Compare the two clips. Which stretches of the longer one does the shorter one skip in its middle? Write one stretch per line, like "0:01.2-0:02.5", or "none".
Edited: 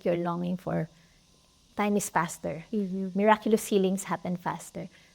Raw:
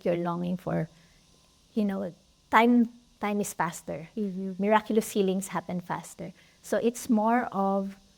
0:01.6-0:03.0